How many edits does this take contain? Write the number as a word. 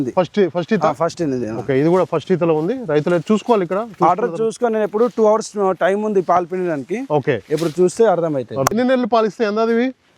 one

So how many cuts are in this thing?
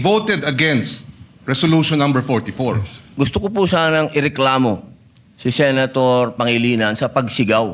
one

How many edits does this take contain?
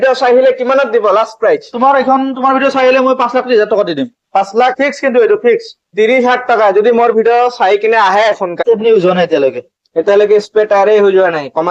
one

